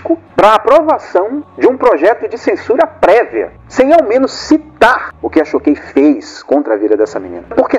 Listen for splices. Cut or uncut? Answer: cut